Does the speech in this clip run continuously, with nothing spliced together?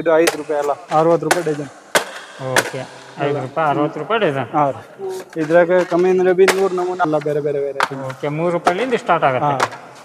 no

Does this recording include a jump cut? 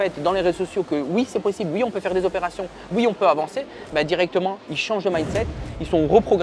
no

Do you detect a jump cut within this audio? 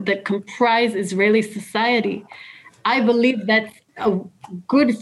no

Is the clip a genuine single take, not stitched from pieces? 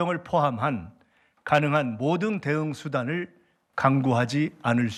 yes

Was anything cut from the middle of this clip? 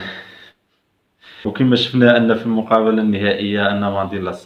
yes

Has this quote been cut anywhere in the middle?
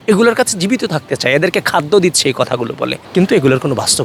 no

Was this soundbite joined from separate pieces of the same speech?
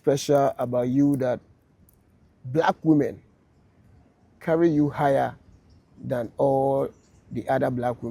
no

